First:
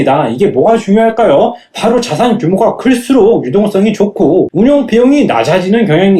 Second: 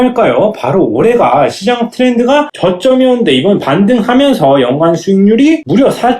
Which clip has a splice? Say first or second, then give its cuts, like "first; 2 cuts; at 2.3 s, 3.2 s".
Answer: second; 1 cut; at 2.5 s